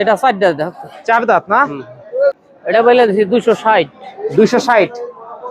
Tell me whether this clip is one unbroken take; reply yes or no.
no